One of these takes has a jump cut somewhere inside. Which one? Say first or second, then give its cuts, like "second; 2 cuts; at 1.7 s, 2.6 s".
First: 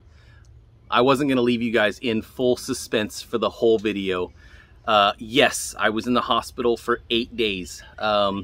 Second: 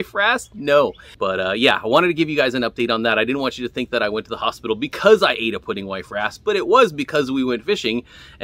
second; 1 cut; at 1.1 s